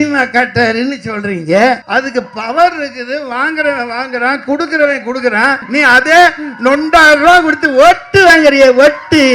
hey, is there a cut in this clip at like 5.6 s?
yes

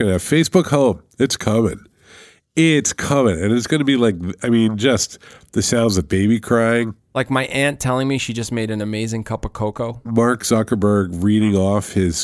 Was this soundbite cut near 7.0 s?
yes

